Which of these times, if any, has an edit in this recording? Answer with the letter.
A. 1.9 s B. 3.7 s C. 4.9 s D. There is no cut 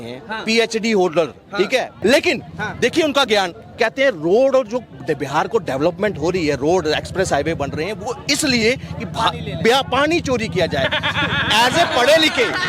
A